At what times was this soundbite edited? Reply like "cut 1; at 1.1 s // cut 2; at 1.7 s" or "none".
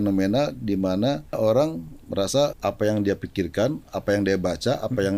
cut 1; at 1.4 s // cut 2; at 2.6 s